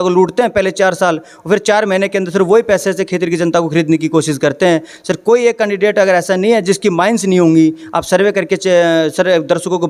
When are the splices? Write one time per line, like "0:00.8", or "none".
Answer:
none